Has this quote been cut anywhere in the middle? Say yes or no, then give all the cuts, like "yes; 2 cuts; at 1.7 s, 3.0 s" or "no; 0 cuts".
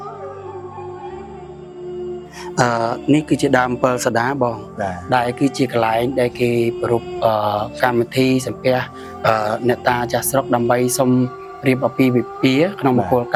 no; 0 cuts